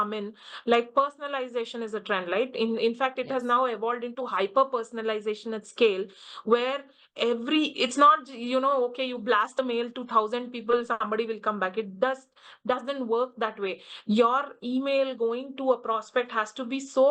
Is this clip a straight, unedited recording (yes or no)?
yes